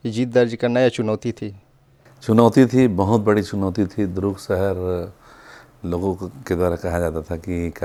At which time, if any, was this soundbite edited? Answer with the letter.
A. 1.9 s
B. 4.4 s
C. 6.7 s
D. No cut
D